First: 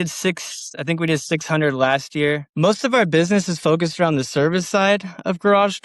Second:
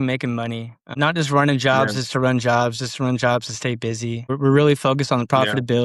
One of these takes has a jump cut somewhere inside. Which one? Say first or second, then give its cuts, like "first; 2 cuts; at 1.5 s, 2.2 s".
first; 1 cut; at 2.5 s